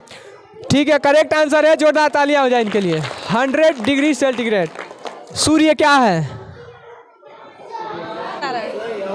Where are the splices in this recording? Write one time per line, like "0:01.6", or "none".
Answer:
0:05.3
0:08.4